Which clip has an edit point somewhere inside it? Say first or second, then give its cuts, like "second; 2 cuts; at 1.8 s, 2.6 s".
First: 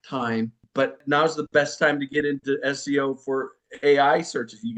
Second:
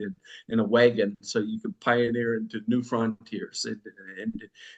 first; 2 cuts; at 1.0 s, 3.6 s